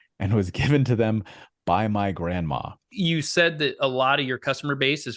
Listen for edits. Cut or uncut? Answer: cut